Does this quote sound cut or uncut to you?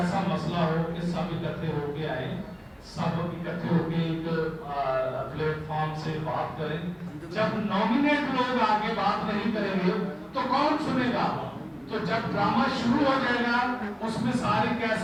uncut